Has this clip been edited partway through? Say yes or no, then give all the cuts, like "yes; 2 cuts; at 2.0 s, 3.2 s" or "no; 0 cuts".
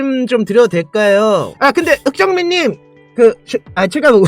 yes; 1 cut; at 1.5 s